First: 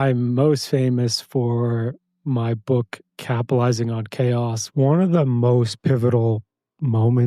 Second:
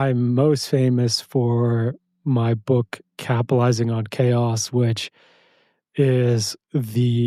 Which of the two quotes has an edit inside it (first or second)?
first